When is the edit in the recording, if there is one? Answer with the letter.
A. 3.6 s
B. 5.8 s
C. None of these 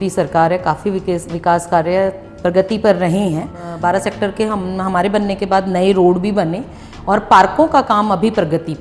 A